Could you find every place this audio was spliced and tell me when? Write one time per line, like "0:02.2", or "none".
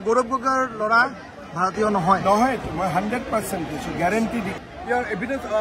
0:04.6

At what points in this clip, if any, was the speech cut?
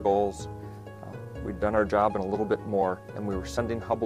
0:01.2

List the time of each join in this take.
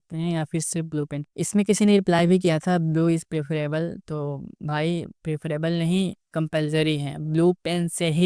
none

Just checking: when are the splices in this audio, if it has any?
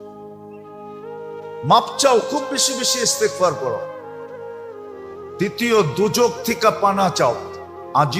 0:03.9
0:05.3

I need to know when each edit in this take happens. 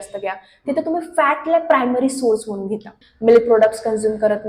0:03.0

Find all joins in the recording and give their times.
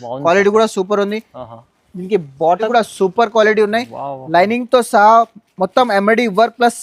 0:02.7

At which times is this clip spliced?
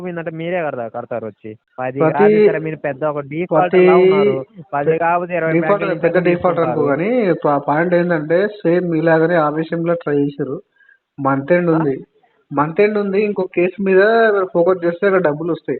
0:01.7

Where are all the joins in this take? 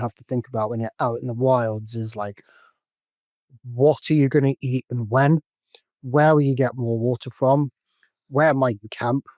none

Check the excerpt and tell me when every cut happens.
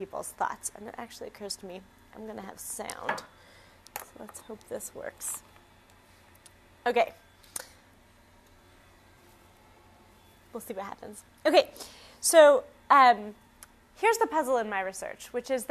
none

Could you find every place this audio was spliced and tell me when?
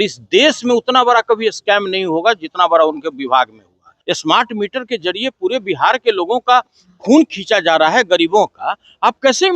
0:03.9

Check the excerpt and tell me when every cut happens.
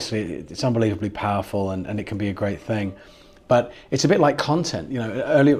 none

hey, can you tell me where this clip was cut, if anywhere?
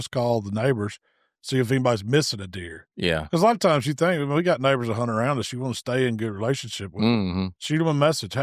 none

